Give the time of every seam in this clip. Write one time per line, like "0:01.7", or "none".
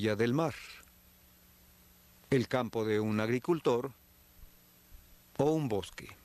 none

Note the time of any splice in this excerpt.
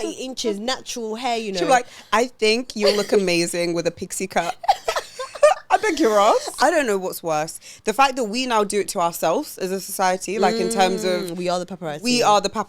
0:06.6

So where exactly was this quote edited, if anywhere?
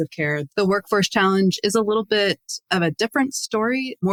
none

